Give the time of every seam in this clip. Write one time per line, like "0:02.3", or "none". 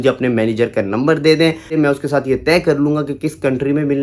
none